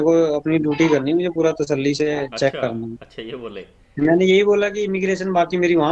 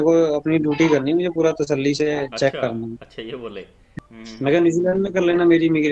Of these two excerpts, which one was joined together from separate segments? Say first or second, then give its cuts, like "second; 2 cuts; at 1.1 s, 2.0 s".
second; 1 cut; at 3.9 s